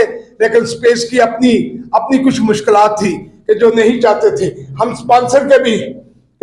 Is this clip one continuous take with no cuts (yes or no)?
yes